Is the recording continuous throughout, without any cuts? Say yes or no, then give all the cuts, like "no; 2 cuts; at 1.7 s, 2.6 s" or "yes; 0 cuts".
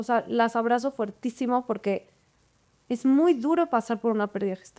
yes; 0 cuts